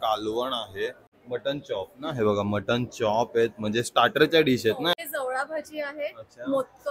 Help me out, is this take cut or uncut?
cut